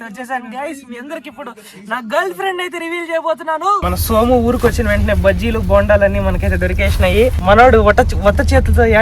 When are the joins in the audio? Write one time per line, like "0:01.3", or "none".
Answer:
0:03.9
0:07.4